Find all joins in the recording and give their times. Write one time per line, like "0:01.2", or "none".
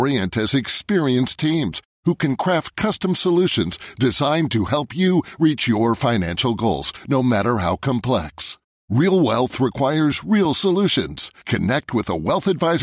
none